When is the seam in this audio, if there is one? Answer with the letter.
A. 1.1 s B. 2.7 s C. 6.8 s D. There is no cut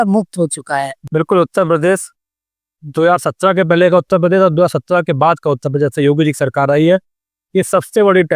A